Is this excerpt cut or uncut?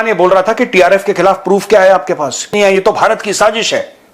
cut